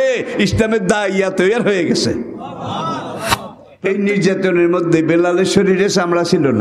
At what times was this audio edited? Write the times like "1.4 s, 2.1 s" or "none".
3.6 s